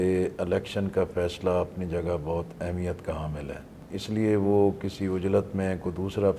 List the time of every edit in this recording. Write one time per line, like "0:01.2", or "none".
0:03.8

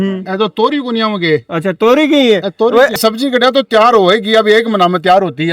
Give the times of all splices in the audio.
0:03.0

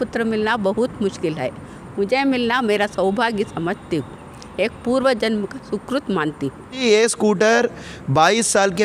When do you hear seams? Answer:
0:06.8

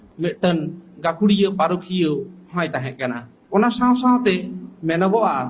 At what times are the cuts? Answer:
none

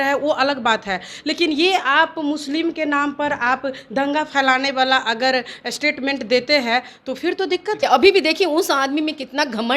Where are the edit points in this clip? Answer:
0:07.8

